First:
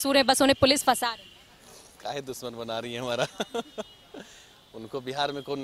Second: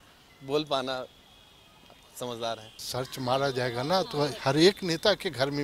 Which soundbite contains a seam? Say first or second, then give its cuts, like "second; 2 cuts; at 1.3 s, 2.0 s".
second; 1 cut; at 2.7 s